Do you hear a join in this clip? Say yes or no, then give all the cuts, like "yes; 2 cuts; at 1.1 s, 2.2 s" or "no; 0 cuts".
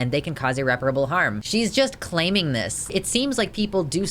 yes; 2 cuts; at 1.4 s, 2.9 s